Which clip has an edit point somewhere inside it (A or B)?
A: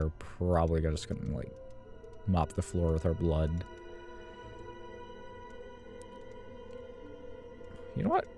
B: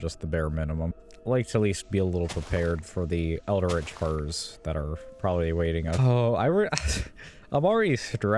B